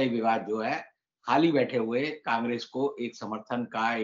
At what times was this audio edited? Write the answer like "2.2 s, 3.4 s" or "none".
none